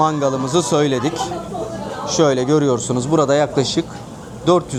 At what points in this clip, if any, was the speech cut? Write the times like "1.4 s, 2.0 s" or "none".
none